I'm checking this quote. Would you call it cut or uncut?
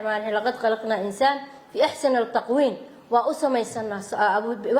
uncut